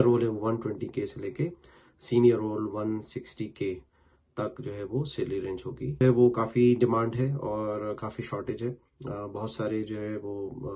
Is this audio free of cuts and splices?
no; 1 cut; at 6.0 s

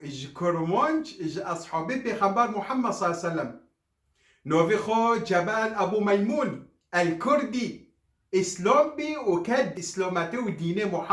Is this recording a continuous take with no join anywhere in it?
no; 1 cut; at 9.8 s

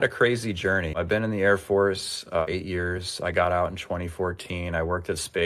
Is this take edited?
yes; 2 cuts; at 1.0 s, 2.4 s

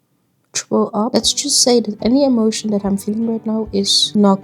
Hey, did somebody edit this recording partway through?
no; 0 cuts

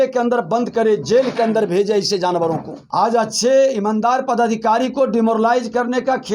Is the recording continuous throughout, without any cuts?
no; 1 cut; at 2.8 s

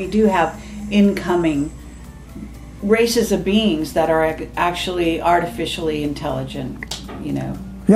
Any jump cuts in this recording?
no; 0 cuts

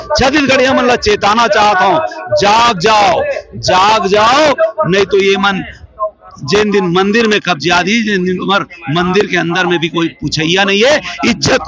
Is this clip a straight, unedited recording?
yes; 0 cuts

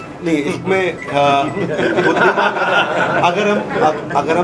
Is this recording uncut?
yes; 0 cuts

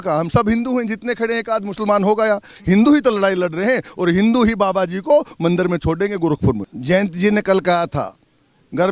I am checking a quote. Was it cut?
yes; 1 cut; at 6.7 s

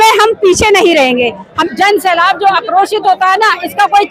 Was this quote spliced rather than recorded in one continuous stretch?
yes; 1 cut; at 1.6 s

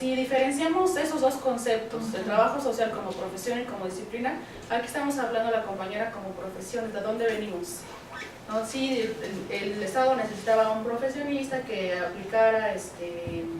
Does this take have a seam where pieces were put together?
no; 0 cuts

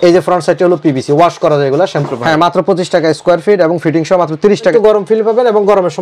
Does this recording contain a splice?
yes; 2 cuts; at 2.1 s, 4.7 s

